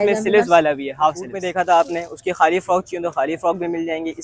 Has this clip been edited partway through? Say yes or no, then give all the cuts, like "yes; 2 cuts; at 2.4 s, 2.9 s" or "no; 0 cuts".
yes; 1 cut; at 1.3 s